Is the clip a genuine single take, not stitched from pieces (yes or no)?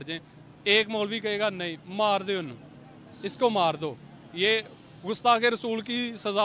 yes